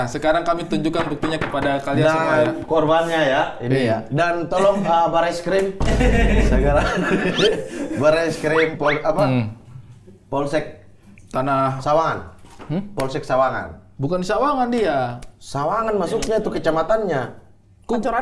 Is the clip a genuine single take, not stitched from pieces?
yes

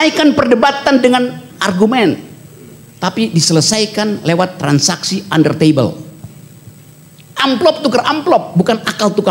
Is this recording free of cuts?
yes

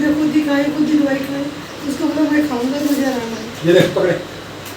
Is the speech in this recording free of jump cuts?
yes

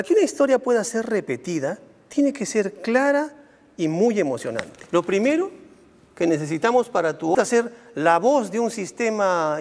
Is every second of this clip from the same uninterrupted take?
yes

